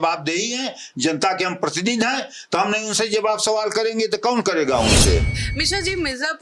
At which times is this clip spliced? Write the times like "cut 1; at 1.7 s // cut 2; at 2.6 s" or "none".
cut 1; at 5.3 s